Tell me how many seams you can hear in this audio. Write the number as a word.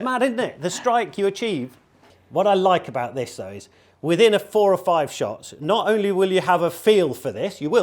one